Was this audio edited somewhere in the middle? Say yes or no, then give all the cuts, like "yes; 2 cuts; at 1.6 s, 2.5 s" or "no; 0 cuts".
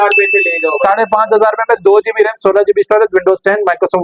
no; 0 cuts